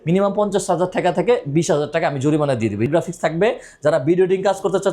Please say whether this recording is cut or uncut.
cut